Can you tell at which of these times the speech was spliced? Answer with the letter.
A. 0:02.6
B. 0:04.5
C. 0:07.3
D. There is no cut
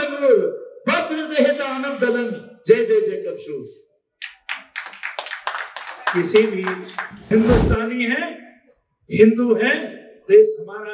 C